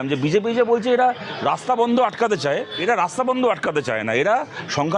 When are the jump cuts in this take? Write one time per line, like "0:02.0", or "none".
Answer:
0:02.7